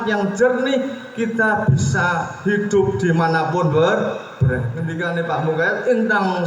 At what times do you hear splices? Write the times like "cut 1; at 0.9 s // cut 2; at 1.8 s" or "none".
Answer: cut 1; at 4.9 s